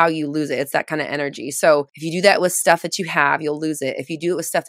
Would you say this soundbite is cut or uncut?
cut